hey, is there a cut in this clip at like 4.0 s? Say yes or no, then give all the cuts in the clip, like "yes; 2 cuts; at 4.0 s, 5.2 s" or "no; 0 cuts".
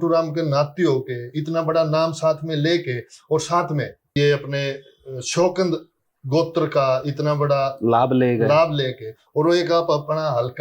yes; 1 cut; at 4.0 s